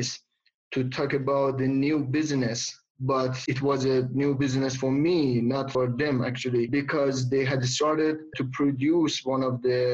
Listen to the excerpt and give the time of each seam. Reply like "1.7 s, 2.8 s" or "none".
3.4 s, 5.7 s, 6.7 s, 8.3 s